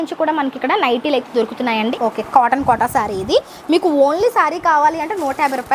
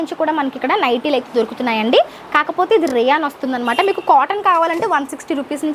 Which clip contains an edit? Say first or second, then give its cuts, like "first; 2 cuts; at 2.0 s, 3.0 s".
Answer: first; 1 cut; at 1.9 s